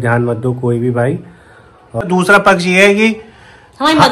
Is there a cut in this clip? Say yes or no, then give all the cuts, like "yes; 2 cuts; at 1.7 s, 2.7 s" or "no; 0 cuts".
yes; 1 cut; at 2.0 s